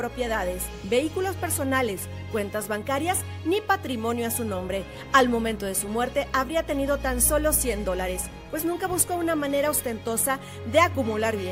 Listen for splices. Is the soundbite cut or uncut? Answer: uncut